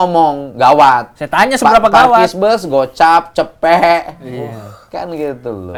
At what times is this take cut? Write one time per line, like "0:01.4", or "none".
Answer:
none